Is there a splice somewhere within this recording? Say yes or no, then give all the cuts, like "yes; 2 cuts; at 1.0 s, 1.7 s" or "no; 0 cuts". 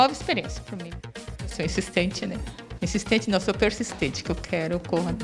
yes; 2 cuts; at 1.4 s, 2.6 s